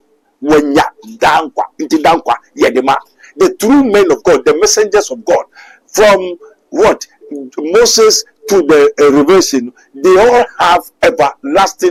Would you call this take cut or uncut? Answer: uncut